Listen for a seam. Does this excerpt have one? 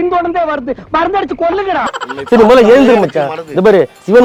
no; 0 cuts

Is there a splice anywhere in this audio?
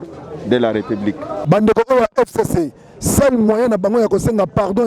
yes; 1 cut; at 1.3 s

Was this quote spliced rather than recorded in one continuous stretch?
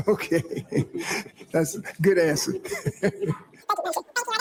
no; 0 cuts

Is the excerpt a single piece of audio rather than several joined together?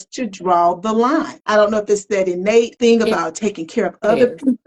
no; 2 cuts; at 1.4 s, 2.7 s

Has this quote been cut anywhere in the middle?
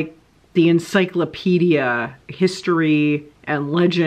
yes; 1 cut; at 2.2 s

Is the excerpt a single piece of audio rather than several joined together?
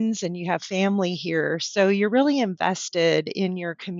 yes; 0 cuts

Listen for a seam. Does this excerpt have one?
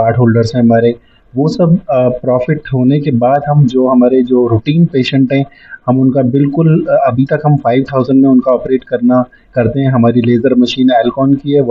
no; 0 cuts

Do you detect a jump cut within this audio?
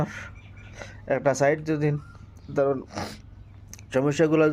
yes; 1 cut; at 3.0 s

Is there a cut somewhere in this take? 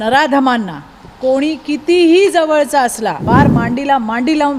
yes; 1 cut; at 3.2 s

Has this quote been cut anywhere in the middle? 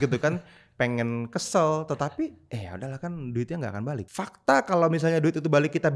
yes; 2 cuts; at 2.4 s, 4.1 s

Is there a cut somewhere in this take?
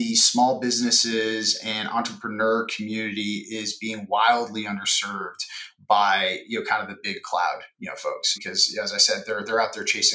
yes; 1 cut; at 8.3 s

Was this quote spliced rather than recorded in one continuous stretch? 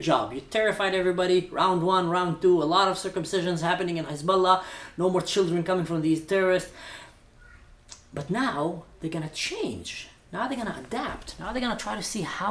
no; 0 cuts

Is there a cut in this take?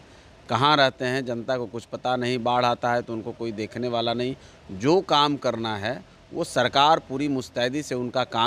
no; 0 cuts

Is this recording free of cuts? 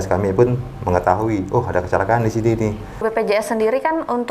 no; 1 cut; at 3.0 s

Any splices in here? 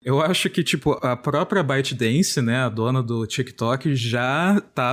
yes; 1 cut; at 1.0 s

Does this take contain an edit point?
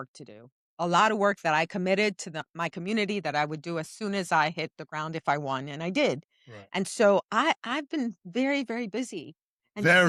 no; 0 cuts

